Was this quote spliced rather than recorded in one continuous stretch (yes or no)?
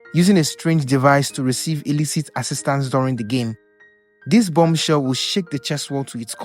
no